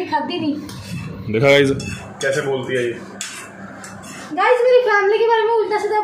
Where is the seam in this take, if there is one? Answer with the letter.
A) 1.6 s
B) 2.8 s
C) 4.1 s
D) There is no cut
D